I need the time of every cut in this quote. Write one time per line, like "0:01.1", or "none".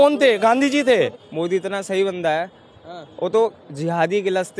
0:01.1

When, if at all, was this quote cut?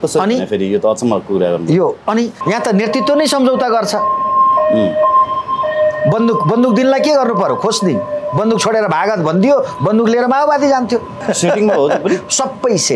0:02.4
0:11.1

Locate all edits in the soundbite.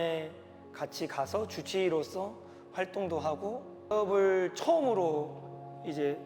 0:03.9

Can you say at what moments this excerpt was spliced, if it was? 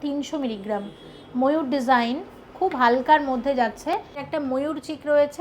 0:04.2

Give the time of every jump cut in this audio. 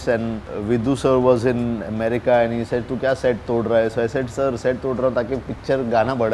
none

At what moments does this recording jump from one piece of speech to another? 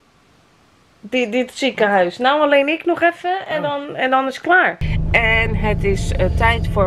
0:04.8

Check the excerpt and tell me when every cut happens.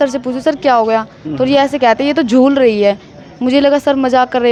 none

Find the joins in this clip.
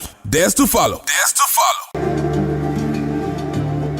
none

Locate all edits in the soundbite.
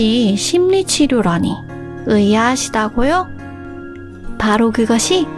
none

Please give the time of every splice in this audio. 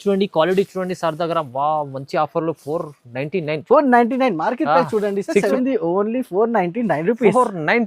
0:05.5

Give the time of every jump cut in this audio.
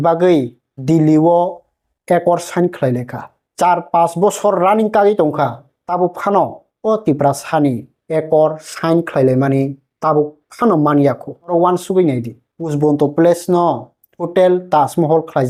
none

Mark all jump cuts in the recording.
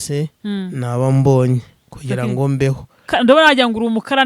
0:03.1

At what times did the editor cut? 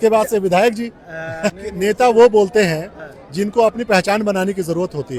0:01.6

